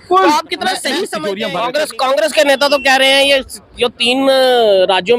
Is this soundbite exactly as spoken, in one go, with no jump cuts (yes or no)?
no